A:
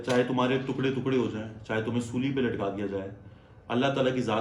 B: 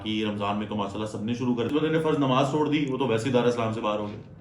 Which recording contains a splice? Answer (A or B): B